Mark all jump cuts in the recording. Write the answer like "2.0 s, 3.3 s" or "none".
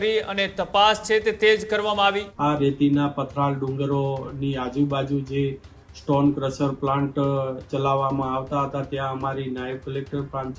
2.3 s

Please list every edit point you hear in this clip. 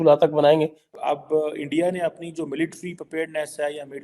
0.9 s

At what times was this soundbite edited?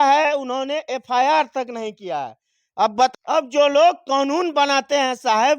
3.1 s

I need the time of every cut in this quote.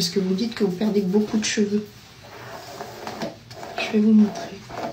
none

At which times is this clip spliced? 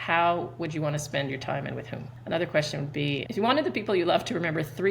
2.1 s, 3.2 s

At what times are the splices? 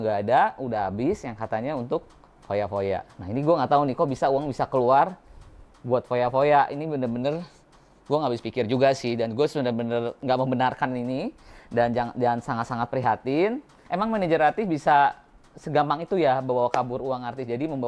13.8 s

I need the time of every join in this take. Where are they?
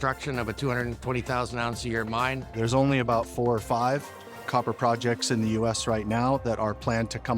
2.5 s

